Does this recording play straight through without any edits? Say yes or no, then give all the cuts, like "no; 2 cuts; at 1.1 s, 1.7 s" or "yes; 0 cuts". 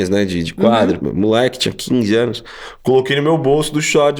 no; 1 cut; at 1.0 s